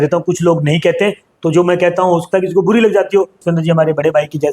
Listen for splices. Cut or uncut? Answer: cut